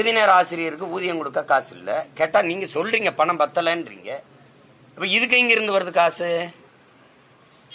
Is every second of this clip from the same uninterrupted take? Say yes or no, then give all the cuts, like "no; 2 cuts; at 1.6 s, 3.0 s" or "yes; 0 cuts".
yes; 0 cuts